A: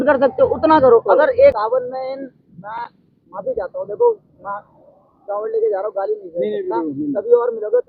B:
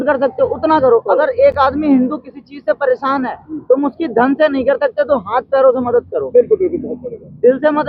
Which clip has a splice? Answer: A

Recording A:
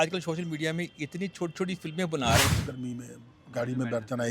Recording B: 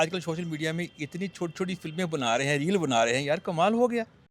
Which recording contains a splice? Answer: A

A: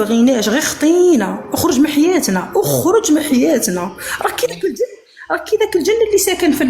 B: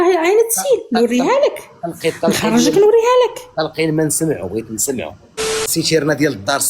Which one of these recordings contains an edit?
B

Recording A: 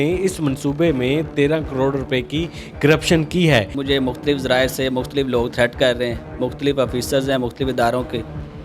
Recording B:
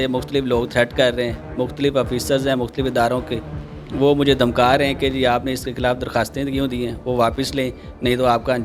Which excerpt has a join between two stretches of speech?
A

